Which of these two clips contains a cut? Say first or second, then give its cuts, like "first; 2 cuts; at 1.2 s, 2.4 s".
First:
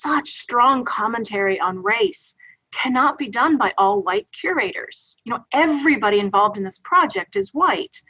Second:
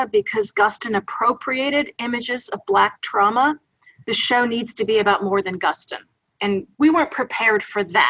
second; 1 cut; at 6.7 s